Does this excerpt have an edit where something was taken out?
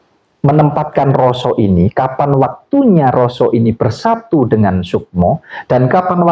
no; 0 cuts

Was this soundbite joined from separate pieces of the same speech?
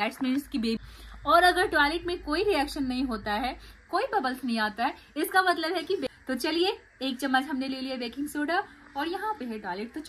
yes; 2 cuts; at 0.8 s, 6.0 s

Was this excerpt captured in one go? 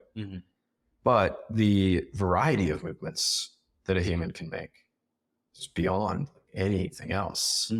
yes; 0 cuts

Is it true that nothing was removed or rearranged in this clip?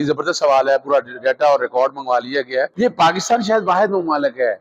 no; 1 cut; at 2.7 s

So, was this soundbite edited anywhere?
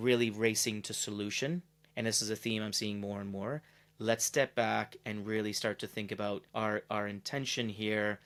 no; 0 cuts

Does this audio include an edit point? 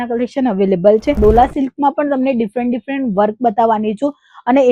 yes; 1 cut; at 1.2 s

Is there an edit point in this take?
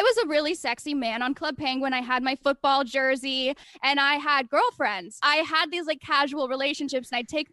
yes; 2 cuts; at 3.6 s, 5.2 s

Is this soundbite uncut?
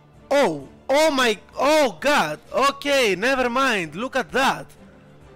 yes; 0 cuts

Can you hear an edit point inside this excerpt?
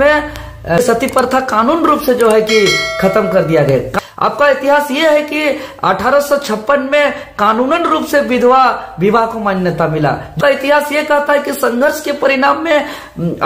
yes; 3 cuts; at 0.8 s, 3.9 s, 10.4 s

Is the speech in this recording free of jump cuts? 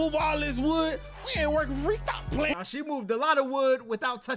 yes; 0 cuts

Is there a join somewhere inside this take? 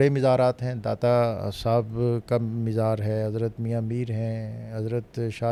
no; 0 cuts

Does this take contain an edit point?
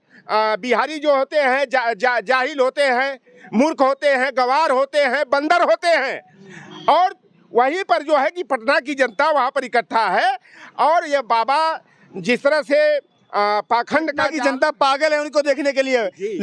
no; 0 cuts

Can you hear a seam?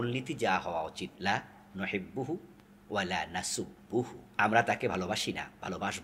yes; 2 cuts; at 1.1 s, 4.2 s

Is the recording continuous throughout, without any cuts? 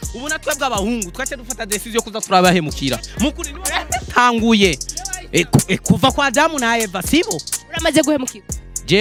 yes; 0 cuts

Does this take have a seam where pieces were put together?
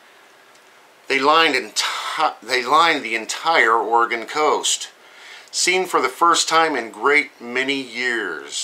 yes; 1 cut; at 5.9 s

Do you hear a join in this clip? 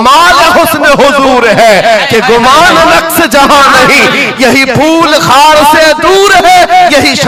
no; 0 cuts

